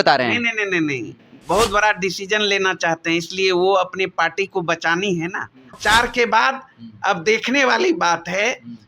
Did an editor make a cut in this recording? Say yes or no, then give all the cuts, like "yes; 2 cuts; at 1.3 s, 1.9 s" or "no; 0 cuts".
yes; 1 cut; at 5.7 s